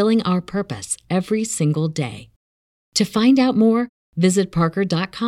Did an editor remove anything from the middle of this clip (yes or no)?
no